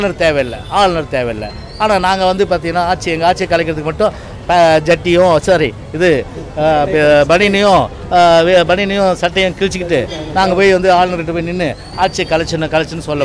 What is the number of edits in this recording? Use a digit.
0